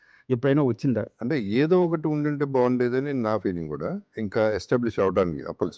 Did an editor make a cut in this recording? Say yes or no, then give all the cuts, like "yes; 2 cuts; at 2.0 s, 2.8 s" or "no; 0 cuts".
yes; 2 cuts; at 1.1 s, 4.1 s